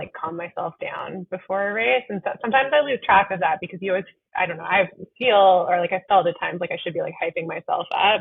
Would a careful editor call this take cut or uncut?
uncut